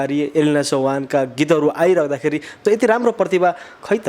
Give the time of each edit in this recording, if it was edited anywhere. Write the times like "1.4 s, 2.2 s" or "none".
2.5 s